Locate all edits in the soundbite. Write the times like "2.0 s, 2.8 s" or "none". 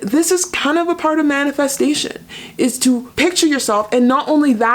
3.1 s